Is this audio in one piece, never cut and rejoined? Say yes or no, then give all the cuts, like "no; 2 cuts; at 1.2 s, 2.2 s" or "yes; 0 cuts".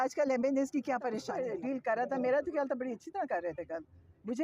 no; 1 cut; at 1.3 s